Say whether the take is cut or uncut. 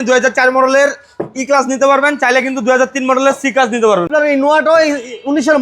cut